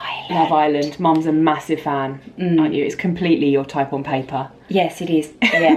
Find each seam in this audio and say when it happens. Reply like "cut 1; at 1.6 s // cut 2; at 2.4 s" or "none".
none